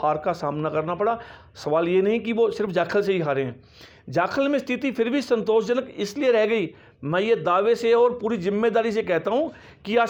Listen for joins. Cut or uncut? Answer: uncut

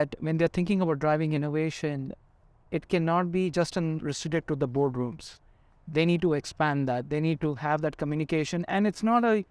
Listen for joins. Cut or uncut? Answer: uncut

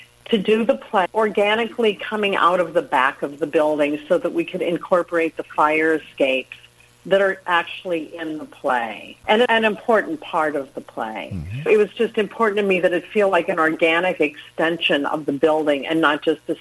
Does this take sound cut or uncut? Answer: cut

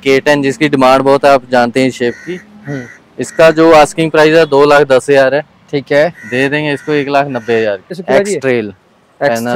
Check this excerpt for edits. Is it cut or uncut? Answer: cut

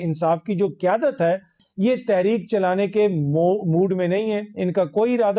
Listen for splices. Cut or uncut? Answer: cut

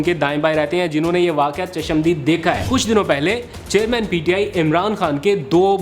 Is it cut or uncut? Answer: cut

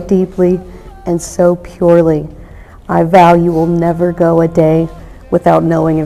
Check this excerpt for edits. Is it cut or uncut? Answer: uncut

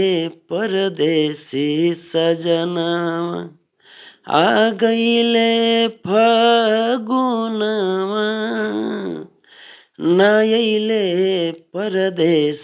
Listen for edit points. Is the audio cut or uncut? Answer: uncut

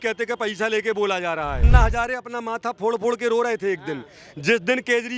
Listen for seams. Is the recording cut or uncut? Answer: cut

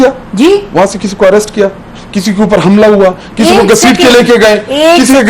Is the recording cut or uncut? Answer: uncut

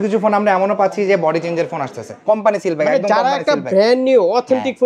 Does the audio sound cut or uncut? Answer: cut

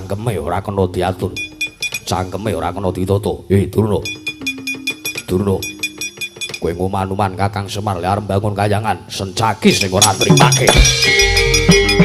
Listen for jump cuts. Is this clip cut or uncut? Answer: uncut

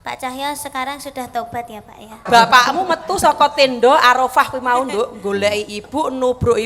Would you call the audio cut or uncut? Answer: cut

